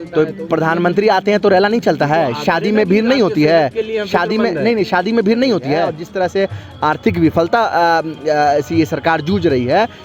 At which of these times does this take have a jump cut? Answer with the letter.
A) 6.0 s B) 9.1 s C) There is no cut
A